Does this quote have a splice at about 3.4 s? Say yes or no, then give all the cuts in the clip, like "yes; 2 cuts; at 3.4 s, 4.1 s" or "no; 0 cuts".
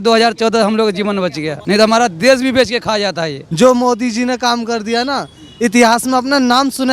yes; 2 cuts; at 1.5 s, 3.4 s